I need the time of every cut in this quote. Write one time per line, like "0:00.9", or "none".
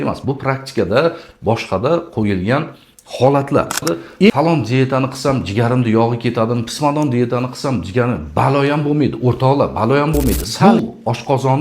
0:04.3
0:10.5

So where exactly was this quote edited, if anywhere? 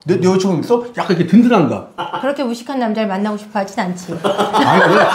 none

